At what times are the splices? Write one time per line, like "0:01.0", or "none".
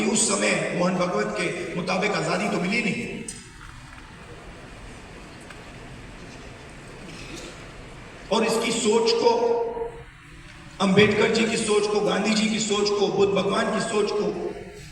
none